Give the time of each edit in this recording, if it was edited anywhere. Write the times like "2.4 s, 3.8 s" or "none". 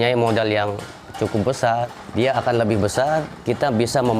2.0 s, 3.3 s